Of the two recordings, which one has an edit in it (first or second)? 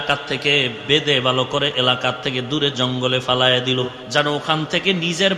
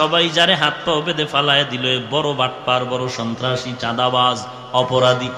first